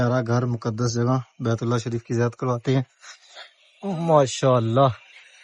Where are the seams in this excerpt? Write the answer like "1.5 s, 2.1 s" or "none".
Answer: none